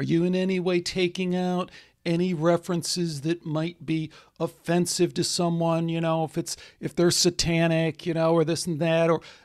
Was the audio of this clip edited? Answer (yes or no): no